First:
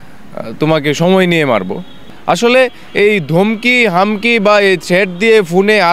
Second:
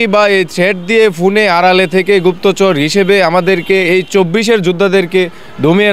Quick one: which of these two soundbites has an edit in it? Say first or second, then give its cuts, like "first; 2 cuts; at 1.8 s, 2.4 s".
first; 1 cut; at 1.9 s